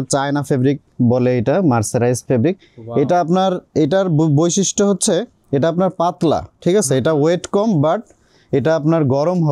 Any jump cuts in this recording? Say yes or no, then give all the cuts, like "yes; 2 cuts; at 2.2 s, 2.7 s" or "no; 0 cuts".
no; 0 cuts